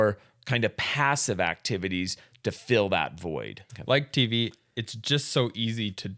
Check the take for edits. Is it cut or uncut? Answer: uncut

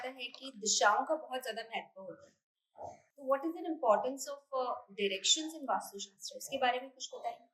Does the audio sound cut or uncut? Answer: uncut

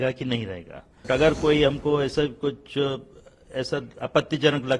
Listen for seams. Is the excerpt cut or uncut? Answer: cut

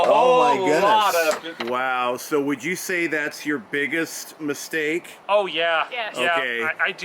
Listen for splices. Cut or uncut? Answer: cut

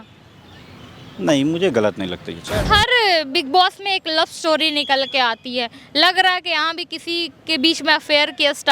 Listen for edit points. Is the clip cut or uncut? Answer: cut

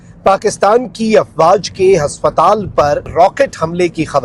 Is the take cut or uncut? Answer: cut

